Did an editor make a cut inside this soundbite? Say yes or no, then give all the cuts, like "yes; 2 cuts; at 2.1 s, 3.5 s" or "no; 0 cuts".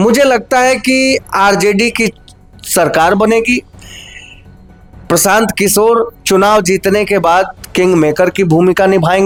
no; 0 cuts